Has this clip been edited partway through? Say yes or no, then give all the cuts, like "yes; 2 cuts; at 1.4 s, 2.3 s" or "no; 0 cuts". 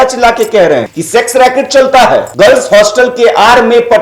yes; 2 cuts; at 0.9 s, 2.3 s